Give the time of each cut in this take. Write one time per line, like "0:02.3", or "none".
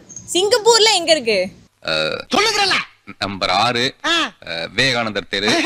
none